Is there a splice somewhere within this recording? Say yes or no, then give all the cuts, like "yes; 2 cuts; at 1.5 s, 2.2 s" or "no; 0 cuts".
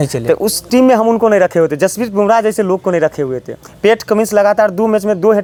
no; 0 cuts